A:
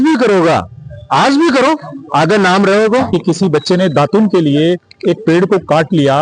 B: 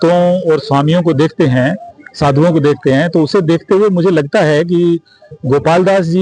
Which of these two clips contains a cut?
A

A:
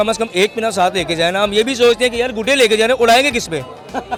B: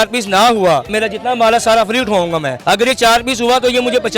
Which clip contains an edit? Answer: B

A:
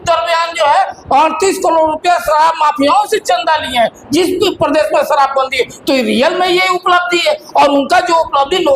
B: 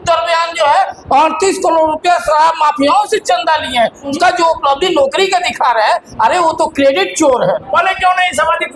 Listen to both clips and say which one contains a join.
B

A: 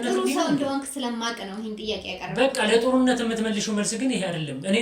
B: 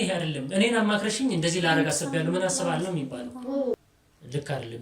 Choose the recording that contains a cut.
B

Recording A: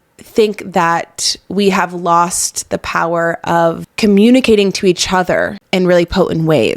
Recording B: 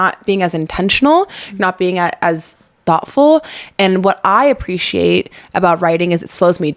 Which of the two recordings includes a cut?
A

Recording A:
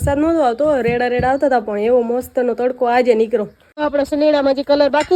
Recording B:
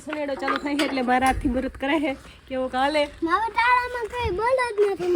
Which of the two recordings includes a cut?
A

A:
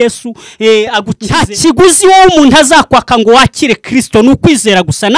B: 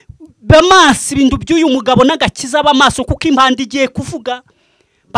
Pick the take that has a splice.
A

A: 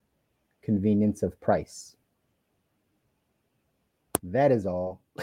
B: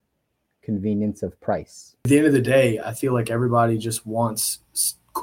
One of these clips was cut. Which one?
B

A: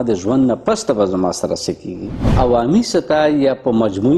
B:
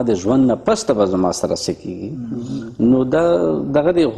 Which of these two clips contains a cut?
A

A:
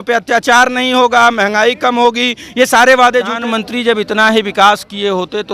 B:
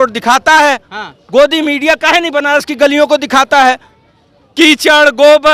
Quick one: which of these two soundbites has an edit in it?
A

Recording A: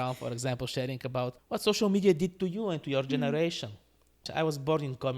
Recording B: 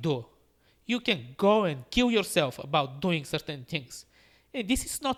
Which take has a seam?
A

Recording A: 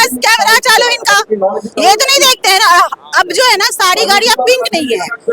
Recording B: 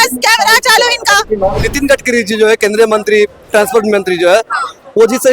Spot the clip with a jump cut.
B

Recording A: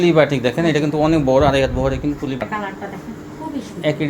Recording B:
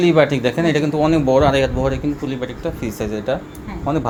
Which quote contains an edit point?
A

